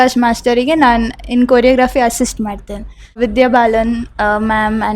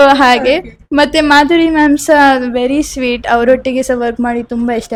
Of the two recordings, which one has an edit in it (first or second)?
first